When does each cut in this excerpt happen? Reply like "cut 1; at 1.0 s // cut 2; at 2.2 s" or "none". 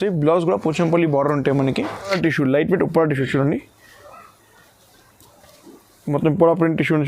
cut 1; at 2.2 s